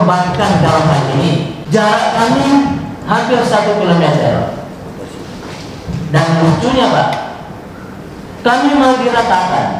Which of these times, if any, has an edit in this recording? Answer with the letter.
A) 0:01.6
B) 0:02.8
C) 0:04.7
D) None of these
A